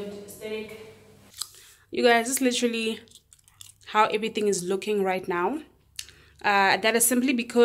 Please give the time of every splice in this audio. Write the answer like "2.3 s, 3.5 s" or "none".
1.3 s